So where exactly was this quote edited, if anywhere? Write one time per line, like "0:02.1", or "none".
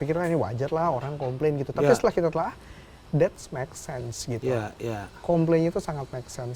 none